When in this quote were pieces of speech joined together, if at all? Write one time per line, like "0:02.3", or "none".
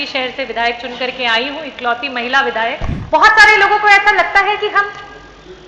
0:02.9